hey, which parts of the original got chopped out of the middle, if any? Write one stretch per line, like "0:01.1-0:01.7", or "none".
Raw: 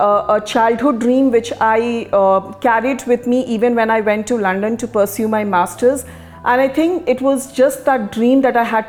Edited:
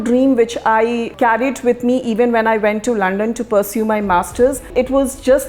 0:02.0-0:02.5
0:06.1-0:07.0